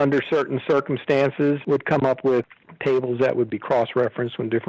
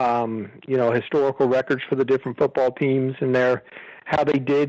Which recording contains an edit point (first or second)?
first